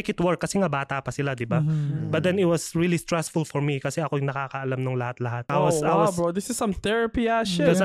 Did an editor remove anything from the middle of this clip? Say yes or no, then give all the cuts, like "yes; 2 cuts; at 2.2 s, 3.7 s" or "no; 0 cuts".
yes; 1 cut; at 5.4 s